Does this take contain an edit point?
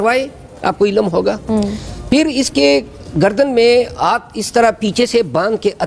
no; 0 cuts

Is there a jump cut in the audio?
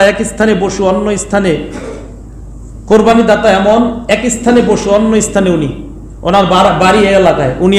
no; 0 cuts

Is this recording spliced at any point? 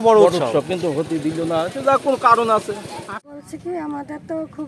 yes; 1 cut; at 3.1 s

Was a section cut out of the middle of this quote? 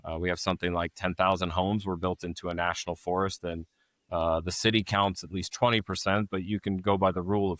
no; 0 cuts

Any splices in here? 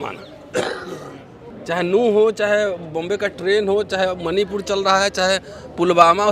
yes; 1 cut; at 1.5 s

